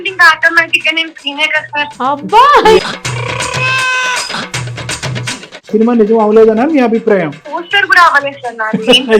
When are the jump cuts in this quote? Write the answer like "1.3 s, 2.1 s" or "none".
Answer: 1.9 s, 2.8 s, 5.7 s, 7.4 s